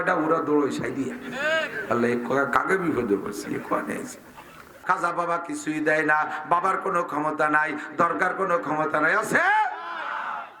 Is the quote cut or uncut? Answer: cut